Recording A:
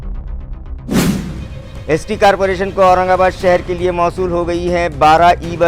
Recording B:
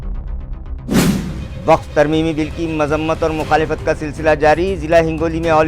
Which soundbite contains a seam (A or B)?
B